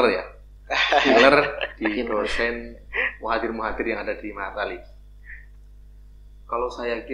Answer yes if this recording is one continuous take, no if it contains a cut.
yes